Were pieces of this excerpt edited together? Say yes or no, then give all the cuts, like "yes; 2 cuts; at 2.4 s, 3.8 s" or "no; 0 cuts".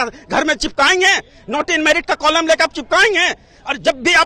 no; 0 cuts